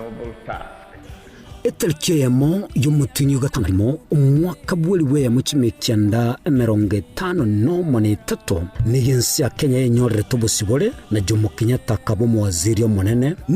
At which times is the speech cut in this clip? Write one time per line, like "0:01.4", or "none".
0:03.6